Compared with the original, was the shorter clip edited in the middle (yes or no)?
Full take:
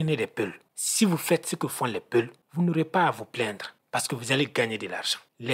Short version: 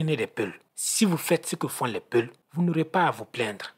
no